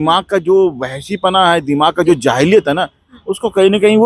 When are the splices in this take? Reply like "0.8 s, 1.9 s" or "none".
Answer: none